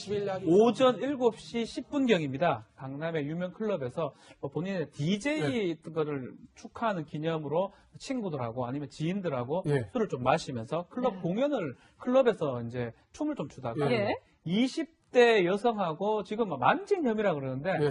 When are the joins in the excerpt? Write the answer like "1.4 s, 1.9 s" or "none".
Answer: 16.2 s